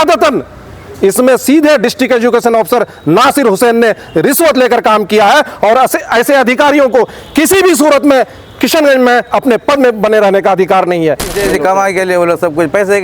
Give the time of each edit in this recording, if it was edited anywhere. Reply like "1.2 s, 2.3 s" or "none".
11.3 s